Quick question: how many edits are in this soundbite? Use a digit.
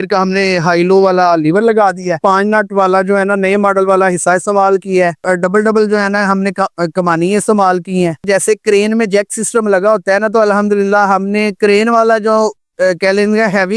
3